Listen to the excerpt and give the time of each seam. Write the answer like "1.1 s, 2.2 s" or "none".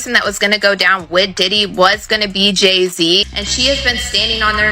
3.3 s